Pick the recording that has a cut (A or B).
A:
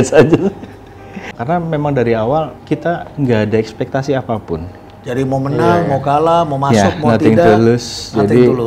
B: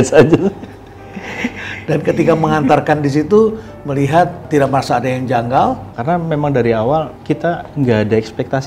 A